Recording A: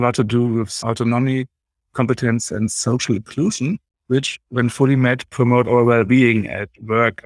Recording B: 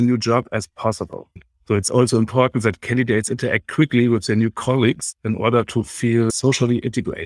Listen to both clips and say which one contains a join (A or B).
B